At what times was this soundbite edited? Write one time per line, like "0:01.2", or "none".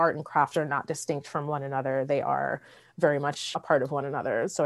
0:03.5

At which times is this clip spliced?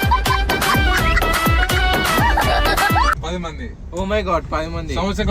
0:03.1

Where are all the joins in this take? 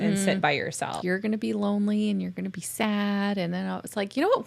0:01.0

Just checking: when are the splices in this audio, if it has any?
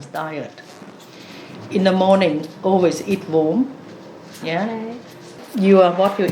0:05.4

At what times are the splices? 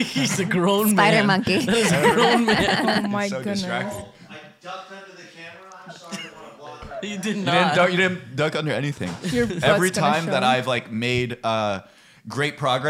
none

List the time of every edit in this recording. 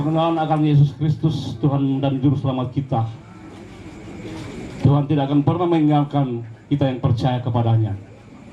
none

